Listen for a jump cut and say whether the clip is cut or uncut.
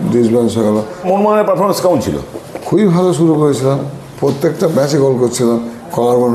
cut